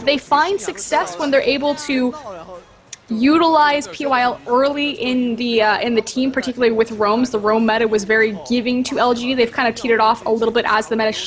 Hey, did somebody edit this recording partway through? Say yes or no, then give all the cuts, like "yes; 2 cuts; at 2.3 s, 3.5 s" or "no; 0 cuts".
no; 0 cuts